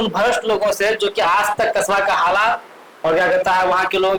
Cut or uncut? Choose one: uncut